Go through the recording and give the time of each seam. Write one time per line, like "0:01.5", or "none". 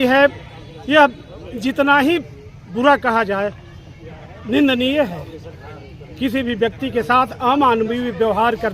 none

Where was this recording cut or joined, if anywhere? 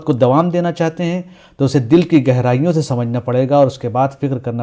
0:03.0

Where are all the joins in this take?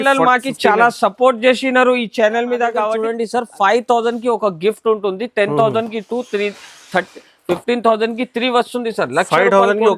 0:03.0

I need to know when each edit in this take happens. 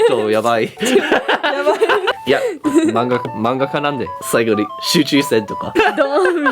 0:02.1
0:04.1
0:05.7

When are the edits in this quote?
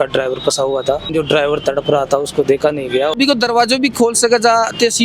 0:01.1
0:03.1

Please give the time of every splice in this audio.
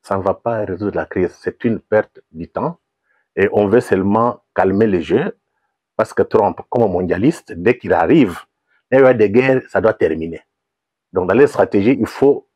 none

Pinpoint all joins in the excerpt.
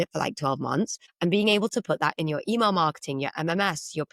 0:01.0

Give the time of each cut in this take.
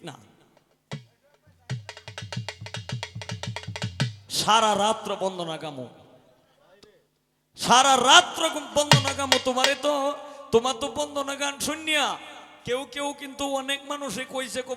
none

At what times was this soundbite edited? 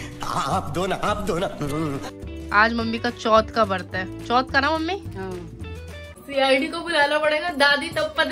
0:06.1

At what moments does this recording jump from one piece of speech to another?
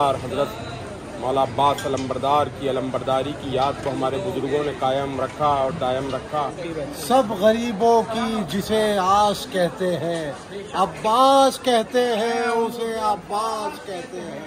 0:06.7

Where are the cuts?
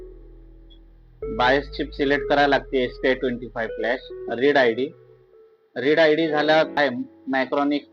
0:06.8

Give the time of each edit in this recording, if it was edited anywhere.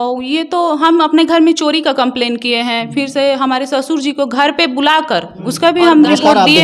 0:05.4

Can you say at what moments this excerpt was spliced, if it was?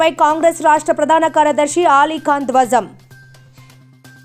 0:02.9

